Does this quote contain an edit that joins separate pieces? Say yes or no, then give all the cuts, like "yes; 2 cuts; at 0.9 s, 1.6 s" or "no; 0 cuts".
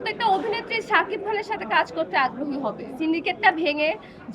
yes; 1 cut; at 2.9 s